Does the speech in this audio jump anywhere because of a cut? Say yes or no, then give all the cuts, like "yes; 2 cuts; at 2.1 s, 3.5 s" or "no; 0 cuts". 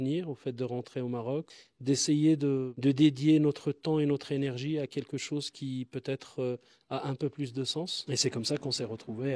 yes; 1 cut; at 8.0 s